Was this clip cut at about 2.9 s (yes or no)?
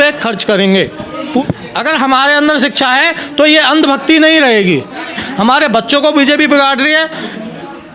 no